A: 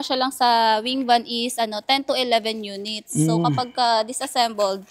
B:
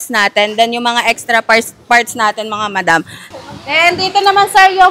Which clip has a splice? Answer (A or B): B